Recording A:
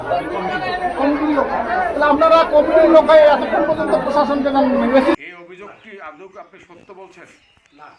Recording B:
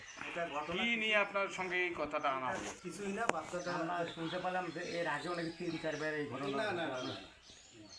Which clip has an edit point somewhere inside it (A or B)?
A